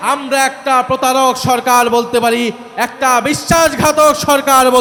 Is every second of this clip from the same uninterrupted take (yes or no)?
yes